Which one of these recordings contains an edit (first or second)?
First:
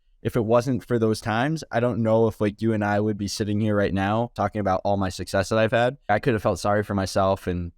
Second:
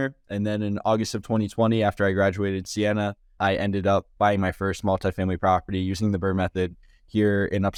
first